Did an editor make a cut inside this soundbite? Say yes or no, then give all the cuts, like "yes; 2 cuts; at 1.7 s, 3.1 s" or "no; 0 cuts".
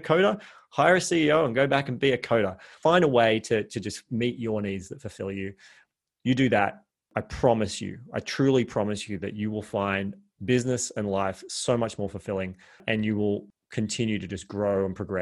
yes; 4 cuts; at 2.8 s, 7.1 s, 12.8 s, 13.6 s